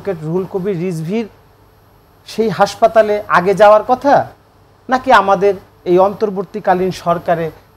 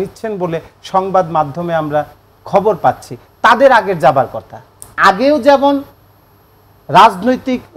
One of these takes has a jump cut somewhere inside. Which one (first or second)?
second